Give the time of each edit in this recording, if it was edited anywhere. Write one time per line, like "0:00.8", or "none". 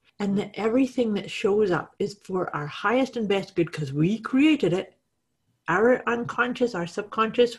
none